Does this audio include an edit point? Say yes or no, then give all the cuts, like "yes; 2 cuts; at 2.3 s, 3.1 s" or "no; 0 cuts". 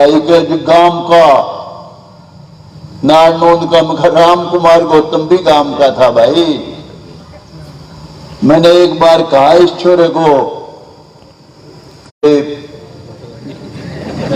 yes; 1 cut; at 12.3 s